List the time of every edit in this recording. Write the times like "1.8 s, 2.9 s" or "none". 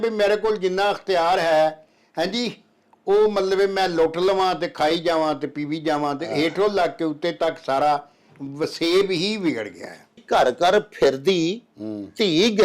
10.2 s